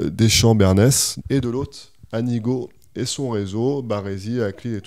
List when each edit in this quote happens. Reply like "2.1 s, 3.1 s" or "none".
1.1 s